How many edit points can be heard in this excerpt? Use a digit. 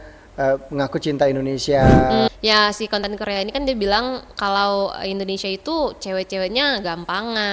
1